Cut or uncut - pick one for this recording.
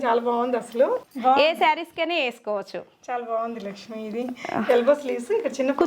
cut